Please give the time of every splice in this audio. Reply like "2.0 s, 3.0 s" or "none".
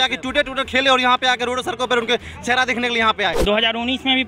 3.4 s